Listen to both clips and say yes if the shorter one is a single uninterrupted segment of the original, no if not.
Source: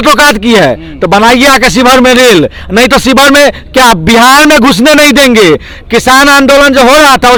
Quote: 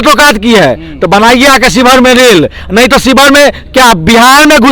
yes